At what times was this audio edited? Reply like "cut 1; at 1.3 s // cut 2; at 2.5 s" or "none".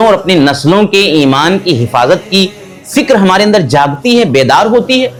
none